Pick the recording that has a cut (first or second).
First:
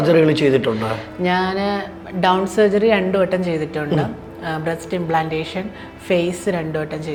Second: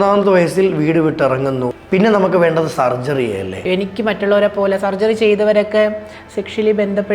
second